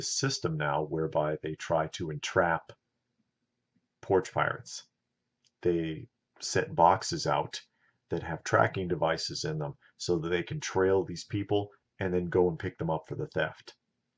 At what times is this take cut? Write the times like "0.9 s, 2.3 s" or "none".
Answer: none

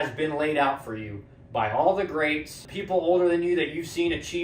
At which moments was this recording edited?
2.7 s

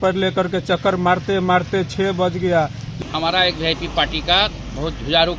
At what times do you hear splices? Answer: 2.9 s

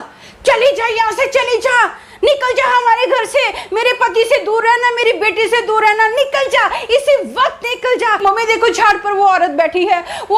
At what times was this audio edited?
8.2 s

